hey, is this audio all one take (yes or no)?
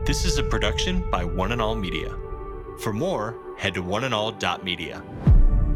yes